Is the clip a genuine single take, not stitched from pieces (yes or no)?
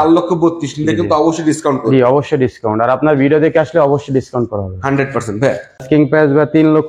no